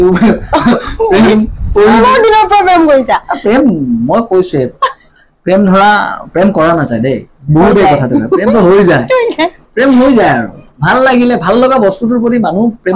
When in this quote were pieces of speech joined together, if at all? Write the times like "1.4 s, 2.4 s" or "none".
none